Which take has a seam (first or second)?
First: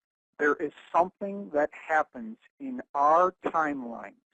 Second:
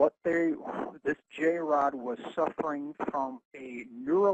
first